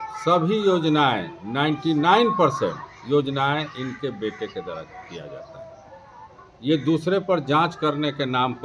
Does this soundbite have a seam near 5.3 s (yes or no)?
no